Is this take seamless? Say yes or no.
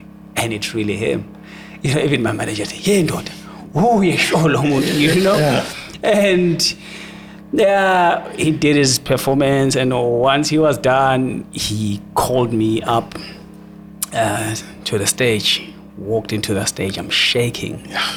yes